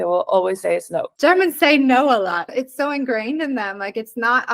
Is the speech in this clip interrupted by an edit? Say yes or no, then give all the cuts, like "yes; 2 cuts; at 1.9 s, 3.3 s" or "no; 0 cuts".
yes; 1 cut; at 1.1 s